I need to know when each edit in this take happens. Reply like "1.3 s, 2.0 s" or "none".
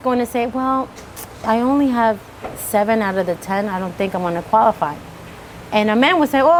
none